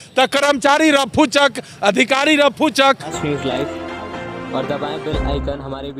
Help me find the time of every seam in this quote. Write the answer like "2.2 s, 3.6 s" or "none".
3.1 s

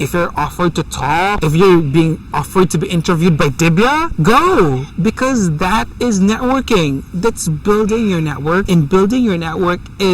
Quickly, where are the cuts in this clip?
1.4 s, 4.1 s, 8.6 s

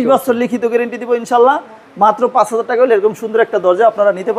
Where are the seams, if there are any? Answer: none

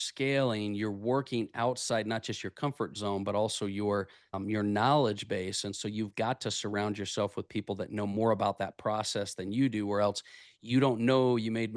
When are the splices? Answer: none

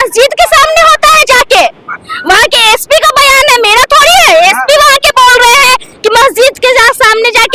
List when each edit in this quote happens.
none

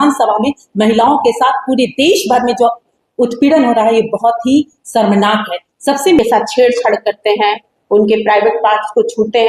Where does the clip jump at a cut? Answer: 6.2 s

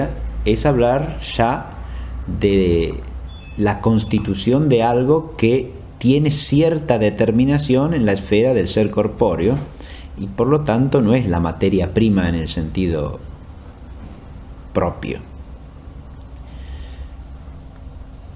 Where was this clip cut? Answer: 6.6 s

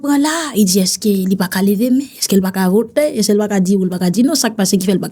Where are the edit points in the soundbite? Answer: none

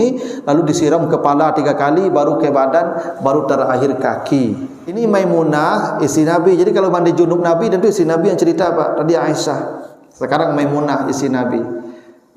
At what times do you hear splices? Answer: 5.0 s

